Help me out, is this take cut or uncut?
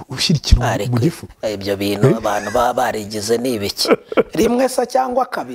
uncut